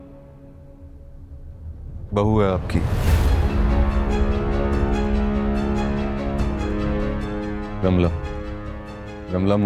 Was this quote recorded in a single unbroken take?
yes; 0 cuts

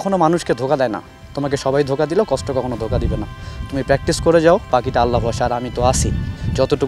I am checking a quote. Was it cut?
no; 0 cuts

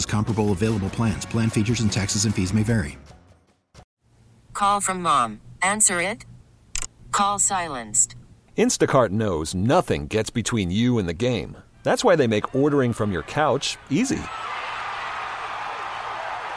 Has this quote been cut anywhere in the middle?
yes; 1 cut; at 3.9 s

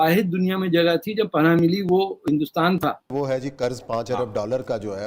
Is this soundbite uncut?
no; 1 cut; at 3.3 s

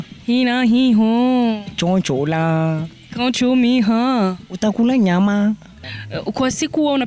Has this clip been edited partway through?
yes; 1 cut; at 5.7 s

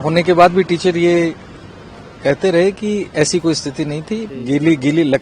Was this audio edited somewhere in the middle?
yes; 1 cut; at 4.3 s

